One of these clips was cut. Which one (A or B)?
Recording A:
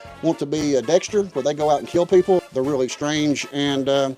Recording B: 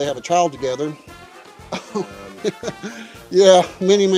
A